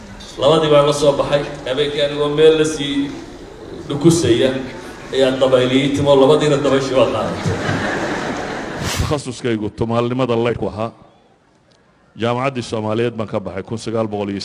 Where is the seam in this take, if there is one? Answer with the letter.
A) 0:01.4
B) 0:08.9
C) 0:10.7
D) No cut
B